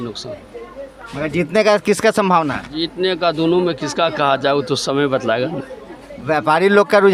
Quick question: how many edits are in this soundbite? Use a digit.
0